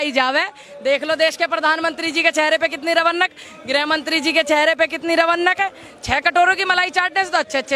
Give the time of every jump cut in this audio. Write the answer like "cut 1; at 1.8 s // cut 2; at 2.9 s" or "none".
none